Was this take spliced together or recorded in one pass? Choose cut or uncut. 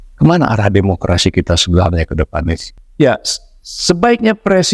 cut